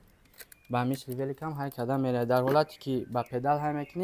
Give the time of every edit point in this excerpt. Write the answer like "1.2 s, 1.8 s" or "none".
none